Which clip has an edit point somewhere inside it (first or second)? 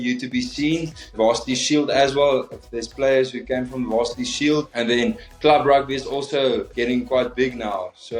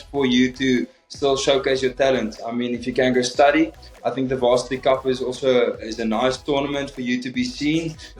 second